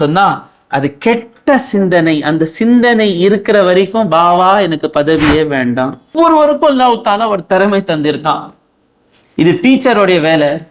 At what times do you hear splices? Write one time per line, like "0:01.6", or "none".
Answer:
0:06.1